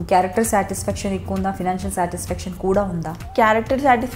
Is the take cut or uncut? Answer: cut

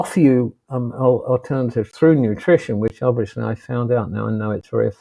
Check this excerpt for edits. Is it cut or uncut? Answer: uncut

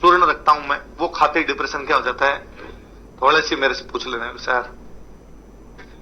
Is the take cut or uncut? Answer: uncut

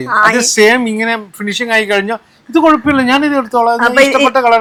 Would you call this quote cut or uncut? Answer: uncut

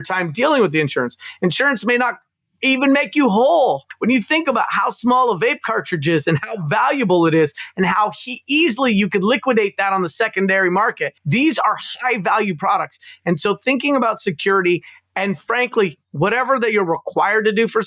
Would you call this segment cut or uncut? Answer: cut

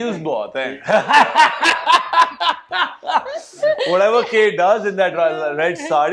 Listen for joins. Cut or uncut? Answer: uncut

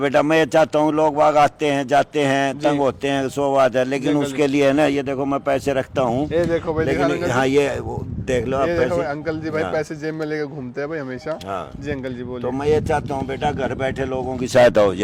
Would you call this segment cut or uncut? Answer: uncut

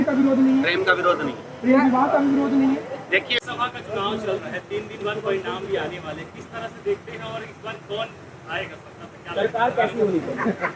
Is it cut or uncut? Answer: cut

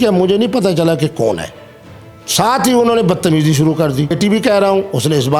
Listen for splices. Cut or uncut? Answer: cut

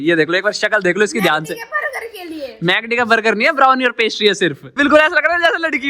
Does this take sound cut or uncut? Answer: cut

